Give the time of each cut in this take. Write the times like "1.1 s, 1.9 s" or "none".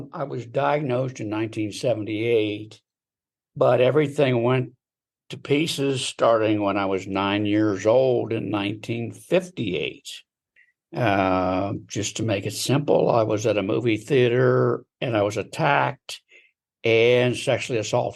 none